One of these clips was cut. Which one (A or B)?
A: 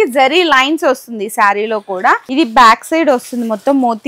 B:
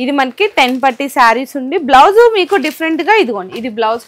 A